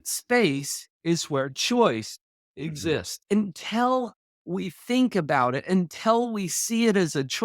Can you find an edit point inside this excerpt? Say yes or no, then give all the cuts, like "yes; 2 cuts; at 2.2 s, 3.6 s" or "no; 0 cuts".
yes; 1 cut; at 3.1 s